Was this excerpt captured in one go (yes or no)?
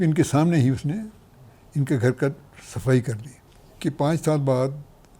no